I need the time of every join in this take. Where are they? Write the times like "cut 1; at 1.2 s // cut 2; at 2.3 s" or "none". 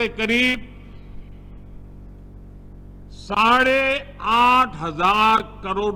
none